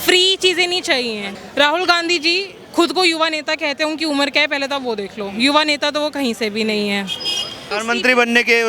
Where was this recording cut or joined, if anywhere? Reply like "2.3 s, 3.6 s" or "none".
1.3 s, 7.7 s